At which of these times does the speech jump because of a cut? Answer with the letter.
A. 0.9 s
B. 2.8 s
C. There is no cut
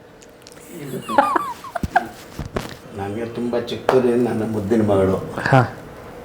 B